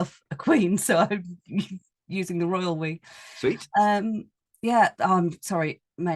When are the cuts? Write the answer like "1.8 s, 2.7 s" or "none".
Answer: none

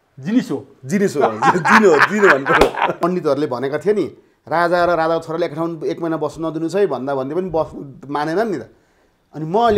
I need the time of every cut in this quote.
3.0 s

